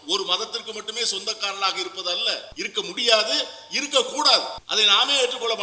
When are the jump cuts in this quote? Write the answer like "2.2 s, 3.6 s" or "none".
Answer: 2.5 s, 4.6 s